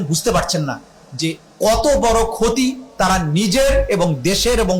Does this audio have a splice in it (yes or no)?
no